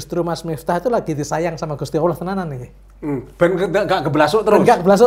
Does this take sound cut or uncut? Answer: uncut